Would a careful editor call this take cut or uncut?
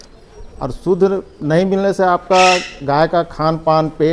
uncut